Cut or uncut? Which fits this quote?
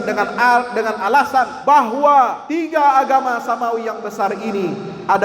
cut